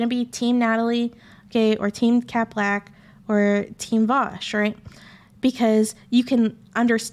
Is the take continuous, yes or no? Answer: yes